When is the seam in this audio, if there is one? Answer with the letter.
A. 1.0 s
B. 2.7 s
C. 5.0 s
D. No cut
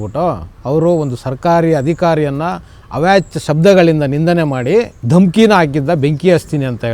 C